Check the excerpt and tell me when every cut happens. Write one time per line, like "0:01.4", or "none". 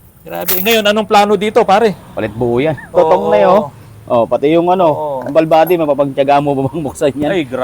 0:02.8